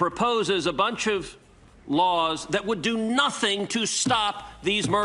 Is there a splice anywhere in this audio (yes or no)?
no